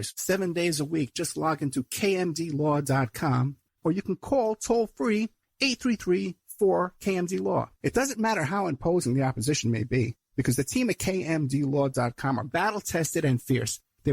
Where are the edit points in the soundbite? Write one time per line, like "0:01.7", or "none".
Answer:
0:03.7
0:07.7

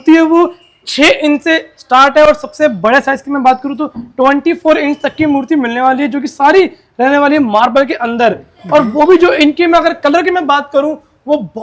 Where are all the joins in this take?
none

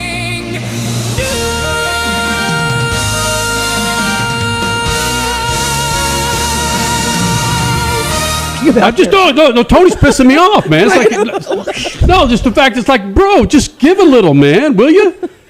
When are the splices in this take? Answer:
0:08.6

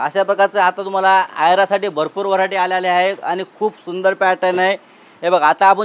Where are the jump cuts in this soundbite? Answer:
none

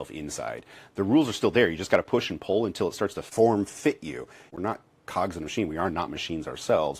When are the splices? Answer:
0:03.2
0:04.4

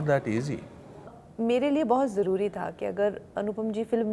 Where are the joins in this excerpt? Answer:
0:01.2

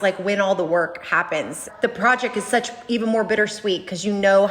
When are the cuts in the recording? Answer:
0:01.6

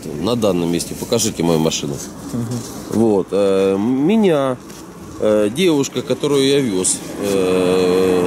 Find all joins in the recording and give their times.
none

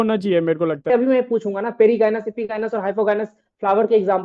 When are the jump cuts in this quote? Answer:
0:00.9

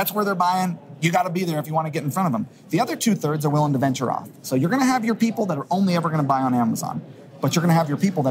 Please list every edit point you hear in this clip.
none

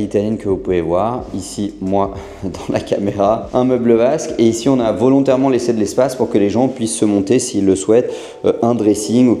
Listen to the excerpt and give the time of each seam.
none

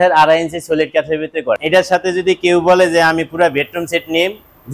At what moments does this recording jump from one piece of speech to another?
0:01.6

